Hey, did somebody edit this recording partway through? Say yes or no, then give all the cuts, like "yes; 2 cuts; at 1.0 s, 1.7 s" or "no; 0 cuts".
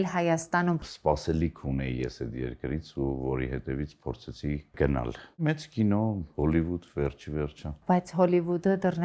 yes; 3 cuts; at 0.9 s, 5.4 s, 7.7 s